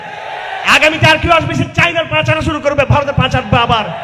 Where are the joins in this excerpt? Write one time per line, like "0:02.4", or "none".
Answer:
none